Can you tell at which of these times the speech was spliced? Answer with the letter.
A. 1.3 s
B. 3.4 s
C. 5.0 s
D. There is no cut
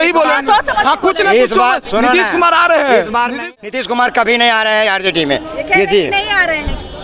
B